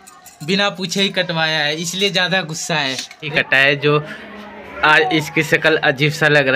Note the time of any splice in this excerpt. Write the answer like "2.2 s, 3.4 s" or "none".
3.3 s